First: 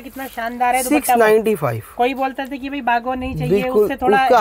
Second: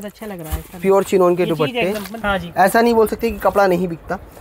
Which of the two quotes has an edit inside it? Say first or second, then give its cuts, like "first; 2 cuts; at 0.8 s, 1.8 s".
second; 1 cut; at 2.2 s